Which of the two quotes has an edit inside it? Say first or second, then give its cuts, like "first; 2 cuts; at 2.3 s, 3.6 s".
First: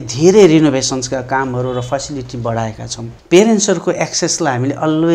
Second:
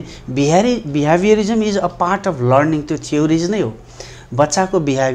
first; 1 cut; at 3.1 s